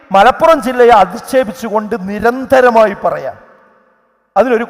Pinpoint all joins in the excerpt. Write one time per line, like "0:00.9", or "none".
none

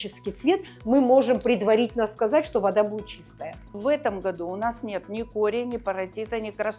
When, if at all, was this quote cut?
0:03.8

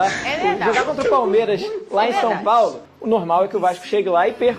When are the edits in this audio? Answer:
0:02.9

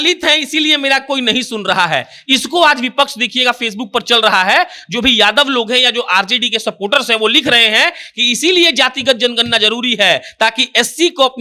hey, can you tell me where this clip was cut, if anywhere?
none

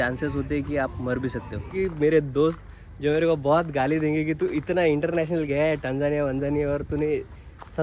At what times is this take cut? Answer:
0:01.7

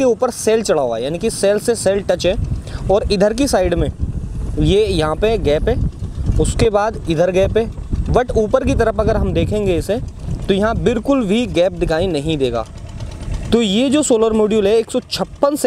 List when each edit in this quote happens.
none

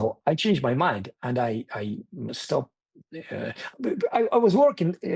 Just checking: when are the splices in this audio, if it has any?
none

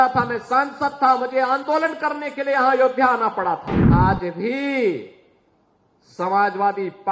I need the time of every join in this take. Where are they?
0:03.8

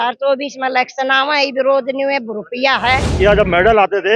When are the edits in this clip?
0:03.1

